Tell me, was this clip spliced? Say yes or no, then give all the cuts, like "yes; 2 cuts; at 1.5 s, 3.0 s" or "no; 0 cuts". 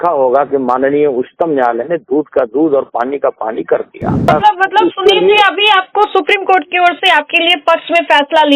yes; 1 cut; at 4.3 s